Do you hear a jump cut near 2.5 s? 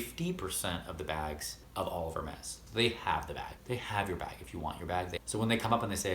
yes; 3 cuts; at 1.5 s, 2.5 s, 5.2 s

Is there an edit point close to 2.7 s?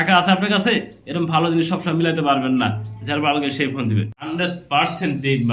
no; 1 cut; at 4.3 s

